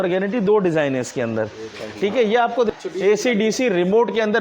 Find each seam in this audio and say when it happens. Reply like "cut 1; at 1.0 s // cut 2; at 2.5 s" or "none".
cut 1; at 2.7 s